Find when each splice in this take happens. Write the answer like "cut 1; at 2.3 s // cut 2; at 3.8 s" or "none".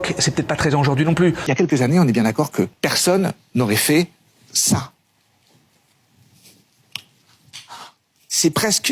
cut 1; at 1.4 s

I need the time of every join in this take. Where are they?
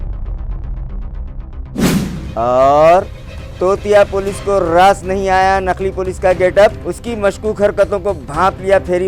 cut 1; at 1.8 s

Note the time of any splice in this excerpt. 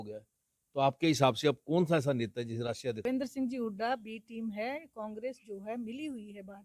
cut 1; at 3.0 s

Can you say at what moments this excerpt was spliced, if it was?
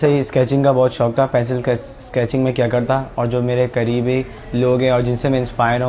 none

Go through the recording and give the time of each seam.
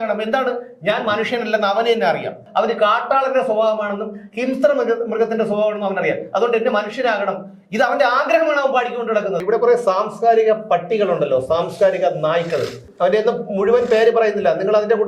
cut 1; at 2.4 s // cut 2; at 9.4 s // cut 3; at 12.8 s

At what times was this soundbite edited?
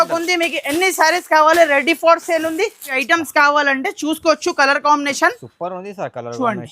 cut 1; at 2.9 s

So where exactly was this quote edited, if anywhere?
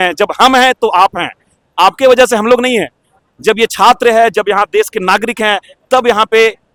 none

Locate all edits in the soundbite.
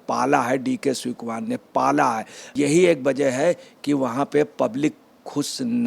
cut 1; at 2.4 s

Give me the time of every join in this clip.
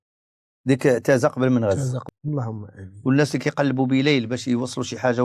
cut 1; at 2.0 s

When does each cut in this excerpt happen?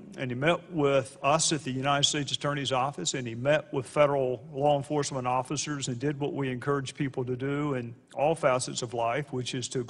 none

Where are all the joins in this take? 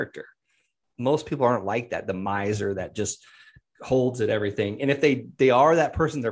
none

